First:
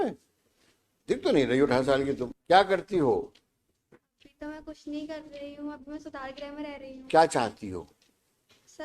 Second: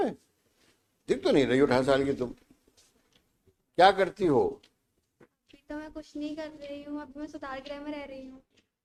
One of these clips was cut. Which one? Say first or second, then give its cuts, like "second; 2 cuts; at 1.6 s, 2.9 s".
first; 2 cuts; at 2.3 s, 7.0 s